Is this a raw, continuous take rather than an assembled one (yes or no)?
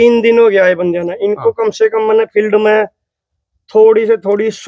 yes